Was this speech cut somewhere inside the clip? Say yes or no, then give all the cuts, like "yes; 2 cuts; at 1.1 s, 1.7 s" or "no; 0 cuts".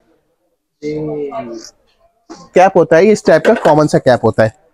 yes; 1 cut; at 2.5 s